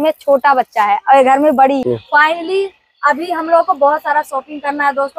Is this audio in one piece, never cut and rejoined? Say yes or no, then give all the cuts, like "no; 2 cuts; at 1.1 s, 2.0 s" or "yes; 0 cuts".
no; 1 cut; at 1.8 s